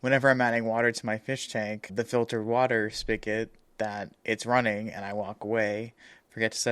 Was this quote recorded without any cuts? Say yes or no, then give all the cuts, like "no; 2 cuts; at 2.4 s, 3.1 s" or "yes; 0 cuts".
yes; 0 cuts